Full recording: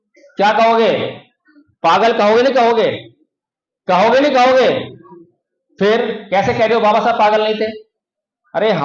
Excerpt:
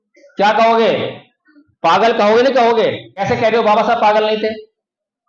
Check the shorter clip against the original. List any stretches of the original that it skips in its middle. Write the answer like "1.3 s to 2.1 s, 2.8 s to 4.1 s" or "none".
3.1 s to 6.3 s